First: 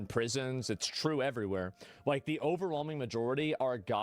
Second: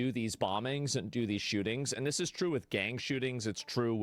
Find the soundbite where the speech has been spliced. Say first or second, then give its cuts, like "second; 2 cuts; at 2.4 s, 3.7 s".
second; 1 cut; at 2.9 s